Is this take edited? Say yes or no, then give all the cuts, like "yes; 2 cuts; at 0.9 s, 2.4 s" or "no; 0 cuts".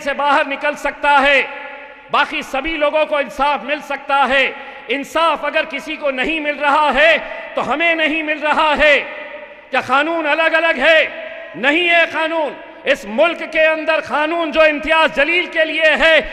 no; 0 cuts